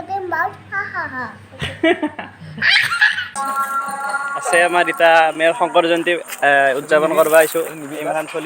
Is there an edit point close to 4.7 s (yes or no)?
no